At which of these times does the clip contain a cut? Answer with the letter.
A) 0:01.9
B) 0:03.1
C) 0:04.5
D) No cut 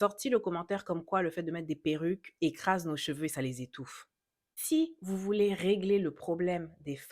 C